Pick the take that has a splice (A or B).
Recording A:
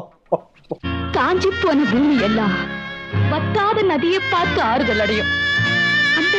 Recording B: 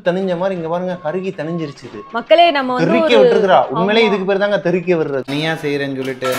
B